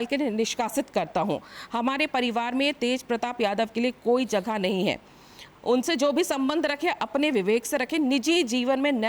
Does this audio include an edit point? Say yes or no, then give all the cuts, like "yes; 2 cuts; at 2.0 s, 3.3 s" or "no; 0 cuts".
no; 0 cuts